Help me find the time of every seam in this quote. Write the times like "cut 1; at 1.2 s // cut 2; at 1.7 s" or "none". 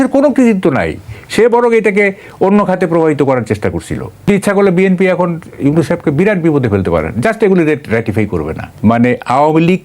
cut 1; at 4.3 s // cut 2; at 8.6 s